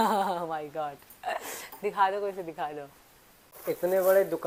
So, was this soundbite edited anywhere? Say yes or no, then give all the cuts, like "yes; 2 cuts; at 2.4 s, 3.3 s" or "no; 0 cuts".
no; 0 cuts